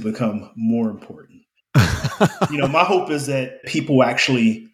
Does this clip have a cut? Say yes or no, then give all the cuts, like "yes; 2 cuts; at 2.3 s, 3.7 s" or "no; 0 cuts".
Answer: yes; 1 cut; at 3.7 s